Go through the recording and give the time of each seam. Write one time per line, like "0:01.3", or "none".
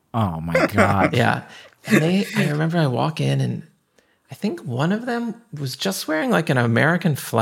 0:01.5